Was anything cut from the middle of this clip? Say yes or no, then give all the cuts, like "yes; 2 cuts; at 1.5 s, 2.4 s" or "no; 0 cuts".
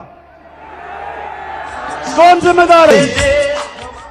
no; 0 cuts